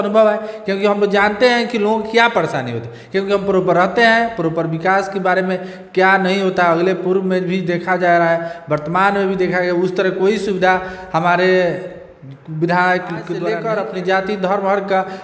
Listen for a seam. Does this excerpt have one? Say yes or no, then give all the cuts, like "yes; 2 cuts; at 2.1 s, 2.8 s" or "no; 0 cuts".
yes; 1 cut; at 13.4 s